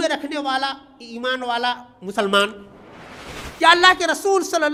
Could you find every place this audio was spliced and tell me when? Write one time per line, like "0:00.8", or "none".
none